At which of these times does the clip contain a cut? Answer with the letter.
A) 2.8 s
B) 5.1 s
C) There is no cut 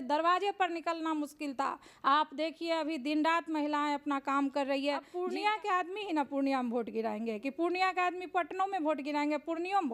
B